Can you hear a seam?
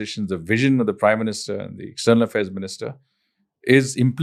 no; 0 cuts

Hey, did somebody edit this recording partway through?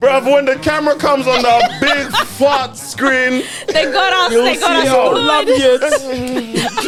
no; 0 cuts

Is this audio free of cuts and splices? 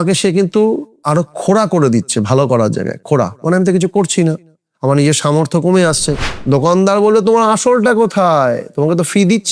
no; 2 cuts; at 1.0 s, 6.1 s

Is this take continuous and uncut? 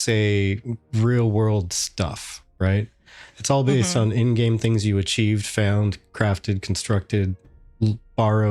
yes; 0 cuts

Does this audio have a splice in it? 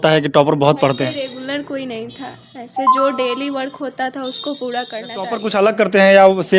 yes; 1 cut; at 5.3 s

